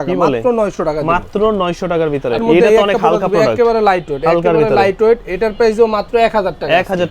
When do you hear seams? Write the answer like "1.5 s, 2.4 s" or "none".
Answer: none